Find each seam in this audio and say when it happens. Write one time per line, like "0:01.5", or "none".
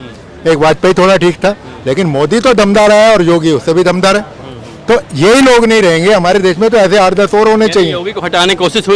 none